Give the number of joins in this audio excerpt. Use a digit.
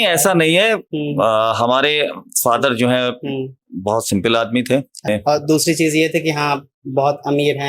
1